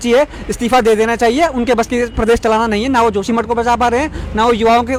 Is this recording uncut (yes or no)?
yes